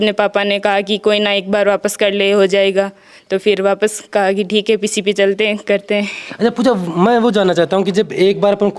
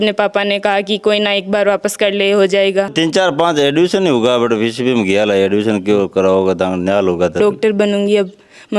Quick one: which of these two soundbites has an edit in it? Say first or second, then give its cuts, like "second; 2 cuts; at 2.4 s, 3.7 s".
second; 2 cuts; at 2.9 s, 7.3 s